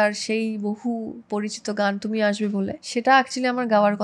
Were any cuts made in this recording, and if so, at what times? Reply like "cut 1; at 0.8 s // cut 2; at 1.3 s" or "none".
cut 1; at 2.8 s